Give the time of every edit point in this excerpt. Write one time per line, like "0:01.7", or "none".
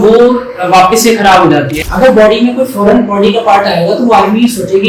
0:01.7